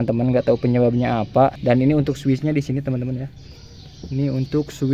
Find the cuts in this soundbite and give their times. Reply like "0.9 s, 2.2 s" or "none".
1.6 s